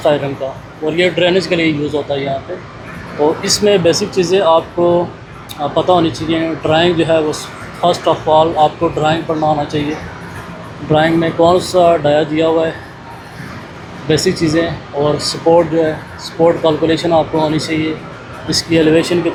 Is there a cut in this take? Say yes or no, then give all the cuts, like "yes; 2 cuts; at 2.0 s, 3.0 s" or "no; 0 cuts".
no; 0 cuts